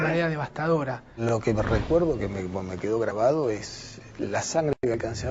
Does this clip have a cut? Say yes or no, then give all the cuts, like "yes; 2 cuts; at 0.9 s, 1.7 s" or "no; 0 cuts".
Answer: yes; 1 cut; at 1.0 s